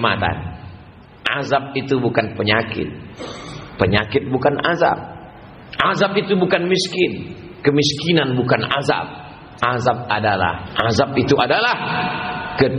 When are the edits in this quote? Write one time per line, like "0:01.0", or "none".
0:10.7